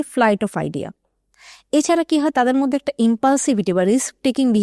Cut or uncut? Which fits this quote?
uncut